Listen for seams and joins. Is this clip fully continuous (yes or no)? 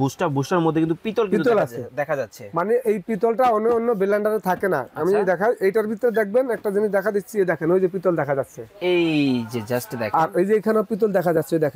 yes